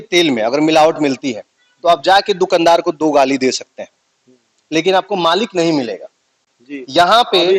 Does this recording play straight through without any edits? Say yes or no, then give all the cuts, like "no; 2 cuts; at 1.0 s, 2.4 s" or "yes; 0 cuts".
yes; 0 cuts